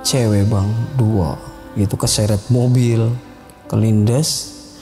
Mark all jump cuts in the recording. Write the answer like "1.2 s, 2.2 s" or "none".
none